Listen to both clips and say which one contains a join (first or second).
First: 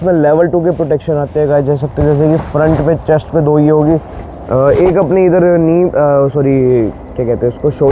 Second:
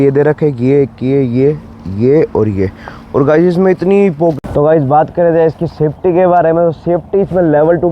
second